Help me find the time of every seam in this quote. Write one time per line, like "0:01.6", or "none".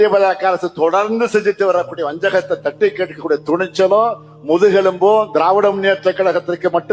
none

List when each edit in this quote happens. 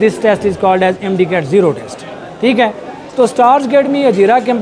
none

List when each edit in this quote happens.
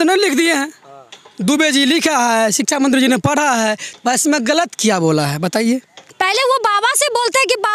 0:06.0

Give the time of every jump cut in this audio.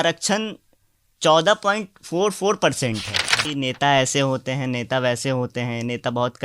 0:03.5

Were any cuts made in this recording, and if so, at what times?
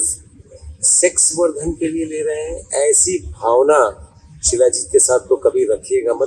none

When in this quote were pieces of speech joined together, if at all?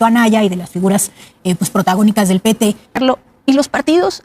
0:03.0

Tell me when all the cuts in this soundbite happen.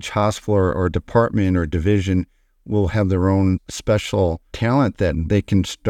0:04.0

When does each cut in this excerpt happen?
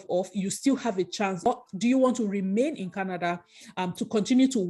0:01.5

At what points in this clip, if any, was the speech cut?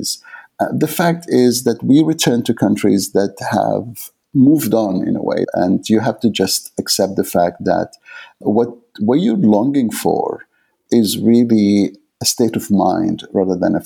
0:05.5
0:08.4
0:10.8
0:12.1

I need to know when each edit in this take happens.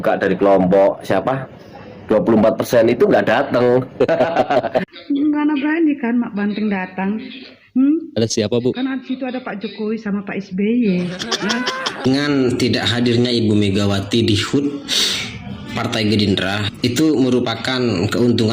0:04.8
0:12.0

